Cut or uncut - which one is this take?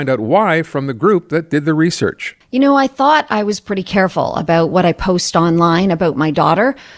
cut